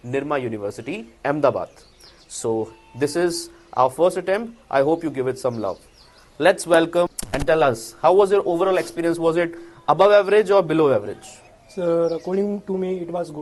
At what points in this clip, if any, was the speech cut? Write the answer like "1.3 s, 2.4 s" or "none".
none